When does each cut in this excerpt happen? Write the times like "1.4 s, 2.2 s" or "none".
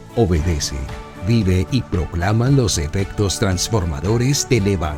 none